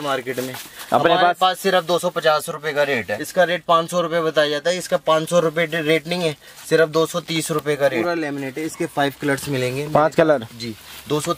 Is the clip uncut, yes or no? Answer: no